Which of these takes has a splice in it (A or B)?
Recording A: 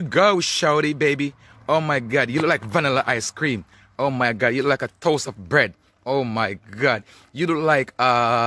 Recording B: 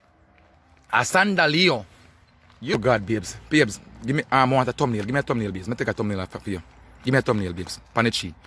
B